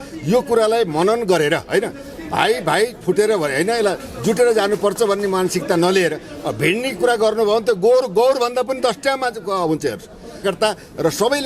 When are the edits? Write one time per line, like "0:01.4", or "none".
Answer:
0:10.4